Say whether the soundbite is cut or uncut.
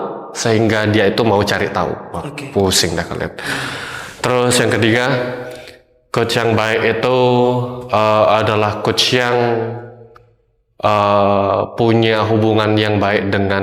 uncut